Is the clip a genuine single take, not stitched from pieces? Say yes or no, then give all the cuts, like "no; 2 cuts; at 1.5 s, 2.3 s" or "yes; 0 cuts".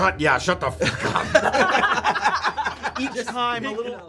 yes; 0 cuts